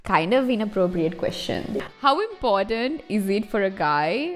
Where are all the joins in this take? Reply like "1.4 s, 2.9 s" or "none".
1.9 s